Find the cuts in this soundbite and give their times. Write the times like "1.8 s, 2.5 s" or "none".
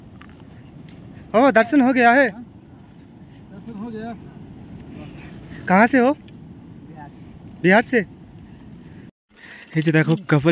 9.1 s